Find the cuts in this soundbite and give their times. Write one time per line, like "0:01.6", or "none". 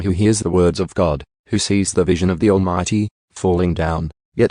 0:01.3